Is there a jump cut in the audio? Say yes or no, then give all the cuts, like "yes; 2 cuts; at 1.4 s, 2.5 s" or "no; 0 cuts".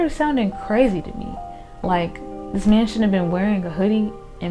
no; 0 cuts